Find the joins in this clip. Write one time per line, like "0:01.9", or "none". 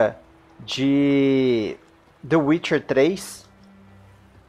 0:02.7

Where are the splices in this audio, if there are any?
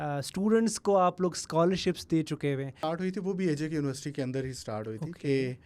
0:02.8

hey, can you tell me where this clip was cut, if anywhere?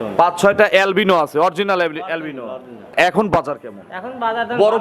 0:02.9

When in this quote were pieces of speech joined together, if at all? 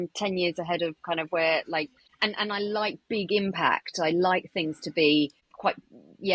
0:02.0
0:05.4

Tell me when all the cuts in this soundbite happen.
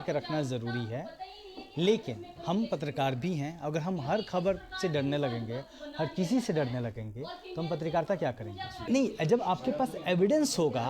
0:08.9

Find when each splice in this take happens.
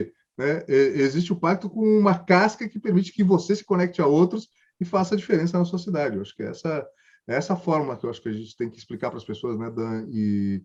none

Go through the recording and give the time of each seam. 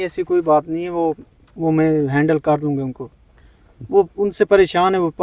none

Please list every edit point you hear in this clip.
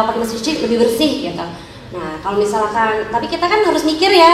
none

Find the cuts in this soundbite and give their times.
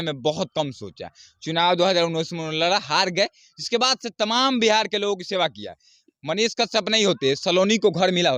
none

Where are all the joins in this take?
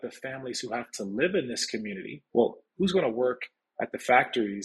0:02.1

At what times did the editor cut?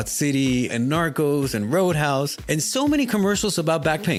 none

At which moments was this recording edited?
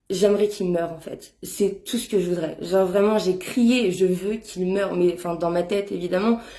none

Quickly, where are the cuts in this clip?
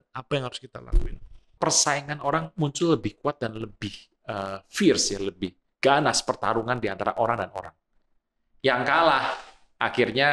0:01.6

